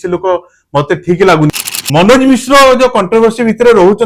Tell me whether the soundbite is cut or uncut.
cut